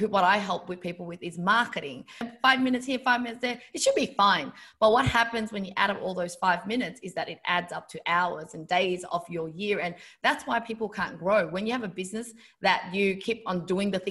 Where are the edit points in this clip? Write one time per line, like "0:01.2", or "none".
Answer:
0:02.3